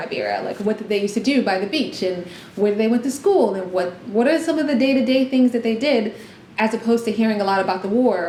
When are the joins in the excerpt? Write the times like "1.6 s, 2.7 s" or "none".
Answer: none